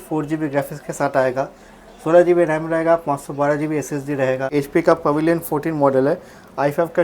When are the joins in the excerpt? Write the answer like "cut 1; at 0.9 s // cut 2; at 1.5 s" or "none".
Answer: cut 1; at 4.5 s